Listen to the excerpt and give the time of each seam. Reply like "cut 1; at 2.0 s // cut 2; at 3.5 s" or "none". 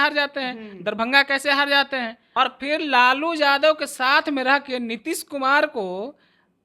cut 1; at 2.2 s